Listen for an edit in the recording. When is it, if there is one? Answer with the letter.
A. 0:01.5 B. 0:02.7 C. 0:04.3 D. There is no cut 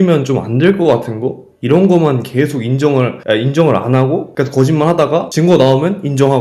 D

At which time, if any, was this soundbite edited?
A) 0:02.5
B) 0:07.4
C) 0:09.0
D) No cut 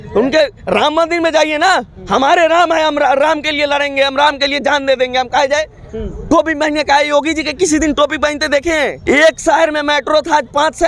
C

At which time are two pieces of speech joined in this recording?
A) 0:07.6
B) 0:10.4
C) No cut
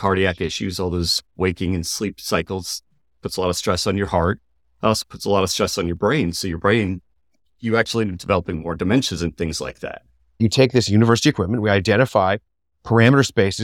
B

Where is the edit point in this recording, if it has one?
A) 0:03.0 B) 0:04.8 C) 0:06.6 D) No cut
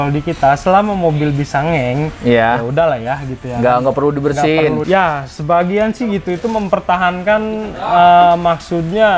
B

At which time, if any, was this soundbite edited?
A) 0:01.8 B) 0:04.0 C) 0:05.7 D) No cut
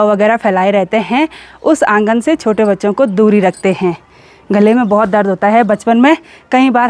D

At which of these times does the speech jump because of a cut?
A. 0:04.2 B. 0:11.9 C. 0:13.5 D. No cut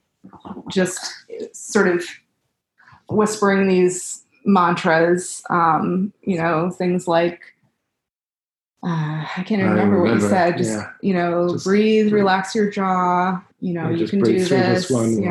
C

